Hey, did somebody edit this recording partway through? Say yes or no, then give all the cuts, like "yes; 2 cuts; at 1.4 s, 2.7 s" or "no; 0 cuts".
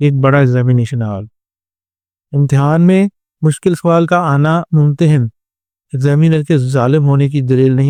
no; 0 cuts